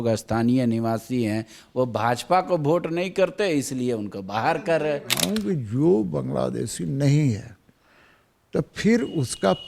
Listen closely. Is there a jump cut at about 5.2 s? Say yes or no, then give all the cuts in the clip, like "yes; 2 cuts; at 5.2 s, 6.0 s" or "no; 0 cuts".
yes; 1 cut; at 5.2 s